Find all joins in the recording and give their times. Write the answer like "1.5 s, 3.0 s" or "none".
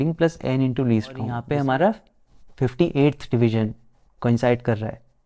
1.4 s